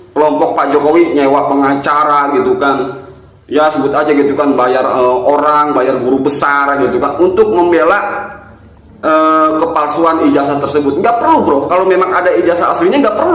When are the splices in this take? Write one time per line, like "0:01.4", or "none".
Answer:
none